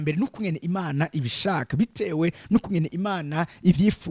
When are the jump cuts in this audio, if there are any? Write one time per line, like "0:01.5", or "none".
none